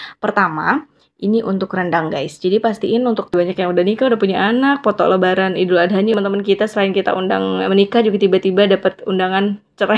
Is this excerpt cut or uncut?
cut